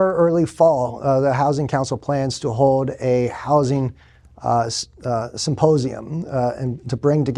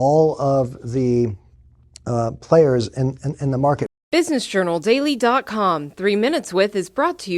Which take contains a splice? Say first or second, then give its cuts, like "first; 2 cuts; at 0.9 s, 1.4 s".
second; 1 cut; at 3.9 s